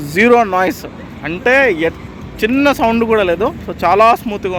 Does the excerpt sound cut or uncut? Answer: uncut